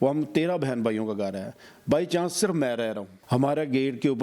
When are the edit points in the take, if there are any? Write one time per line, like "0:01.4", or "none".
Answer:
0:03.1